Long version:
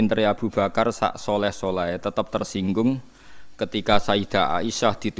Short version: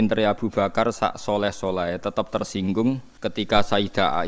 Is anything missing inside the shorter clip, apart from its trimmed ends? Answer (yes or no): yes